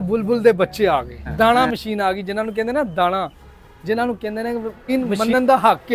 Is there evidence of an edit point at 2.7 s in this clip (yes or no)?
no